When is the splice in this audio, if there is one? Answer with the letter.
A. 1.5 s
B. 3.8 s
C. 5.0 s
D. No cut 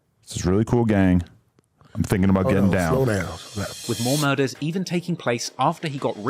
B